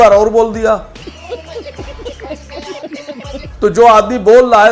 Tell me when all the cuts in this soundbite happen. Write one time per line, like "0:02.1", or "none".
none